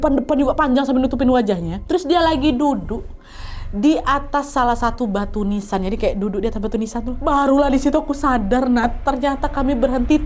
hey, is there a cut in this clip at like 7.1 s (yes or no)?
yes